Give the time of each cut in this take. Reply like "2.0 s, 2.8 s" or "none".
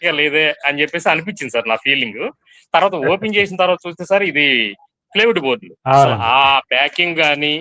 none